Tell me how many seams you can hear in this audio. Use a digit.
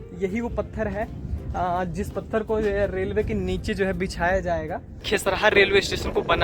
1